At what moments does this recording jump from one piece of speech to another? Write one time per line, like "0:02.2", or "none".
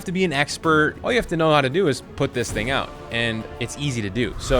0:01.0

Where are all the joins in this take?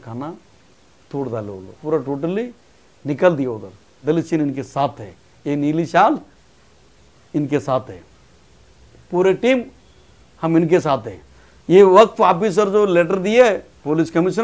0:01.7
0:03.8

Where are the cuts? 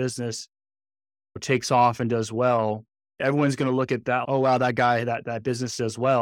0:01.3

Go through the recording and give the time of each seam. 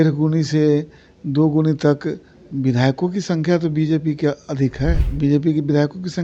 0:05.1

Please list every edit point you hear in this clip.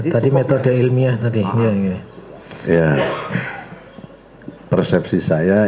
none

